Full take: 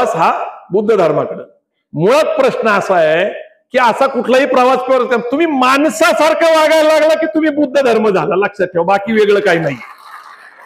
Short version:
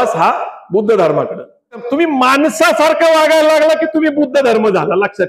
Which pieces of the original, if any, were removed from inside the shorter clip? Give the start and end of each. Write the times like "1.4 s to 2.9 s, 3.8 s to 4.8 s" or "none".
1.9 s to 5.3 s